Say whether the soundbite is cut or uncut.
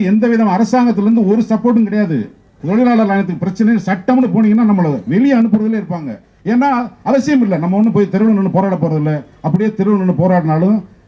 cut